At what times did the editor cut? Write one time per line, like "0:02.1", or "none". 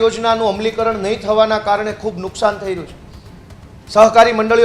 none